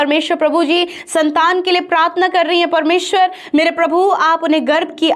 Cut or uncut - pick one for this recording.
uncut